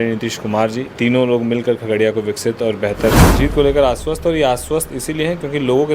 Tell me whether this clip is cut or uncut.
cut